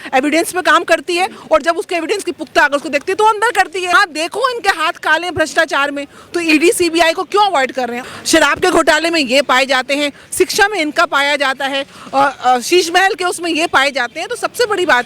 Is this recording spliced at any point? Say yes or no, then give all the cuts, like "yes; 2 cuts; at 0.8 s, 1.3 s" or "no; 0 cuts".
yes; 2 cuts; at 3.9 s, 8.0 s